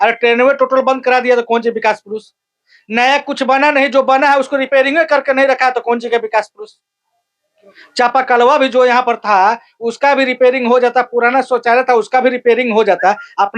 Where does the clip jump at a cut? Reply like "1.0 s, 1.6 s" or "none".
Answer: none